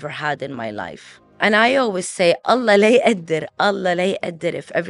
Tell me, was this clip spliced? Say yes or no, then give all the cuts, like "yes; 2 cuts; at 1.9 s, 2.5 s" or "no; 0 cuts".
yes; 1 cut; at 1.4 s